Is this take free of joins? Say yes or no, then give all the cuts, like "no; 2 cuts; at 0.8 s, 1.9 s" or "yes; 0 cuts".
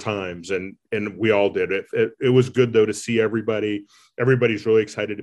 yes; 0 cuts